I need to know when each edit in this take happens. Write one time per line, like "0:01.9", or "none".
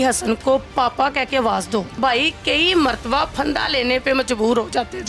0:01.9